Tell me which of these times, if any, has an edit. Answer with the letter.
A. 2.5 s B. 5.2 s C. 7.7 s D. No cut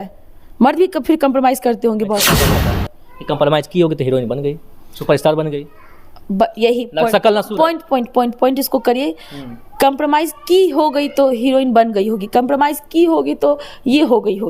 A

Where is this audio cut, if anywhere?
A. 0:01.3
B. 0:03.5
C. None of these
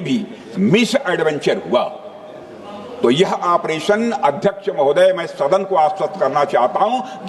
C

